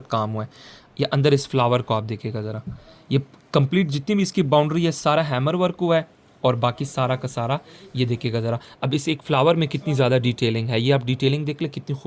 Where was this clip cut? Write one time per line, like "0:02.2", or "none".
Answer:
none